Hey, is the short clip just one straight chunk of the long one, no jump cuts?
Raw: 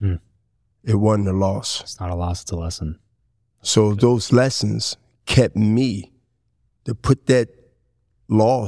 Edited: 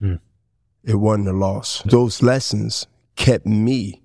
no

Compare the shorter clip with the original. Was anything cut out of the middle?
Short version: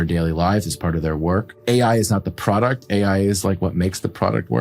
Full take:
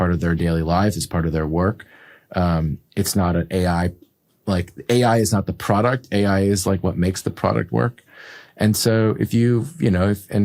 yes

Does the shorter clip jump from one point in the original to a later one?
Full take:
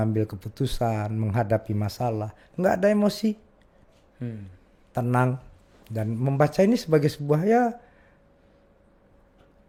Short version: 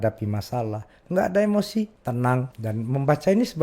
yes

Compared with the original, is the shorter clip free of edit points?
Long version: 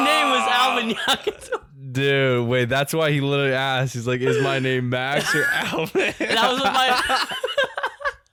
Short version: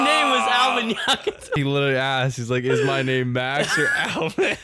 no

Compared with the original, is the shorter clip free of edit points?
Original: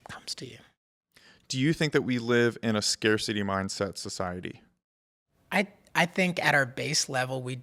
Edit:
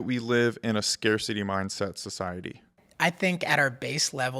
no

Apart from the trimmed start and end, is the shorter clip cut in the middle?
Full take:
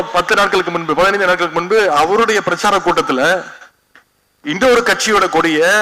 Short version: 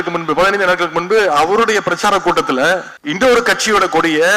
yes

